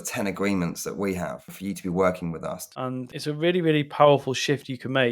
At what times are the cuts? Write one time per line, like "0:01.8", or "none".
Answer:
0:02.6